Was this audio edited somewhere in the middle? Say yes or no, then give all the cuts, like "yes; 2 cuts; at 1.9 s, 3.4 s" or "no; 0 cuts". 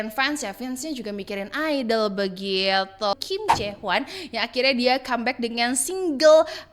yes; 1 cut; at 3.1 s